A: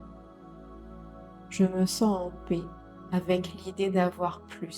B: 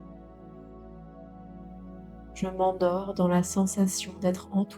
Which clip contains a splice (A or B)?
A